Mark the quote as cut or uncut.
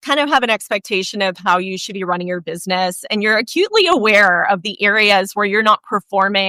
uncut